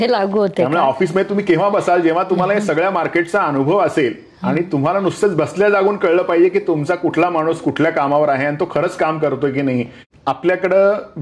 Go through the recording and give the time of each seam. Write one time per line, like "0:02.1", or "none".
0:10.0